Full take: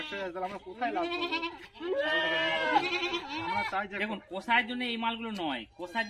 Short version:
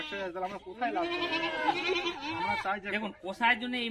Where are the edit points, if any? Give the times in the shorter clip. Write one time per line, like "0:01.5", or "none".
0:01.5